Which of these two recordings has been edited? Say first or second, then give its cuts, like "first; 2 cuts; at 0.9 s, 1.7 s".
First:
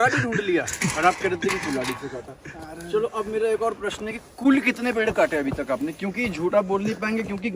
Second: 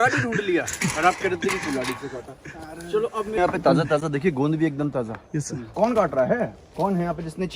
second; 3 cuts; at 3.4 s, 5.6 s, 6.6 s